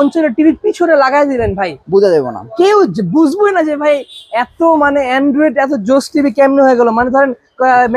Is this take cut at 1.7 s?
no; 0 cuts

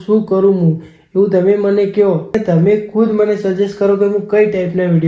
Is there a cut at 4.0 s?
no; 1 cut; at 2.4 s

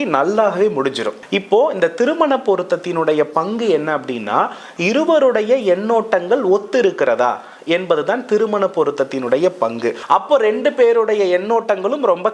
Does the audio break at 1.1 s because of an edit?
yes; 2 cuts; at 1.1 s, 10.0 s

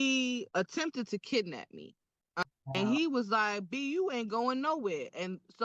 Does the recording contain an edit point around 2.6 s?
yes; 1 cut; at 2.6 s

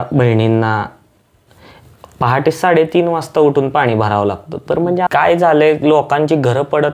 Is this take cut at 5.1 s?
yes; 1 cut; at 5.1 s

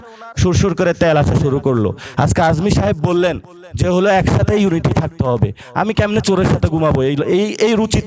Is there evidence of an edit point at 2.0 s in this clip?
yes; 1 cut; at 2.0 s

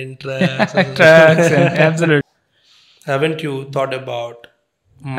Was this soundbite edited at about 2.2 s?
yes; 1 cut; at 2.2 s

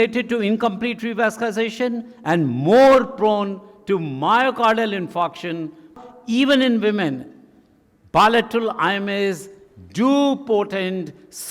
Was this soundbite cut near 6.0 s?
yes; 1 cut; at 6.0 s

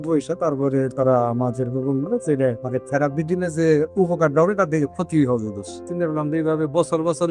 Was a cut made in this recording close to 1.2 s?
no; 2 cuts; at 2.6 s, 5.8 s

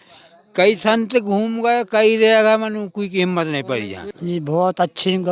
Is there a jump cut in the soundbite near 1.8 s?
no; 1 cut; at 4.1 s

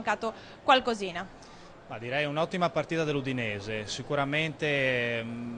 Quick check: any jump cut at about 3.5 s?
yes; 1 cut; at 3.5 s

